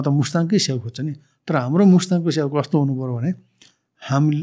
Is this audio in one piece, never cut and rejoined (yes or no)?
yes